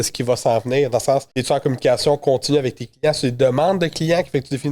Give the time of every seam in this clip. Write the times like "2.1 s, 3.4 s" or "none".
1.3 s